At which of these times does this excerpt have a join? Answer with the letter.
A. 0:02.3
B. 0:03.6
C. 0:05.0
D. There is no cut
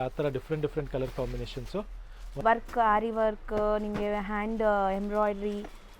A